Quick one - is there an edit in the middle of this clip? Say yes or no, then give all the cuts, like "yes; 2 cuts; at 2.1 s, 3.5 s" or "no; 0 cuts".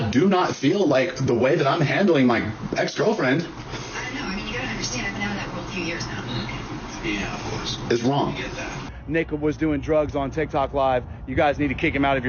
yes; 1 cut; at 8.9 s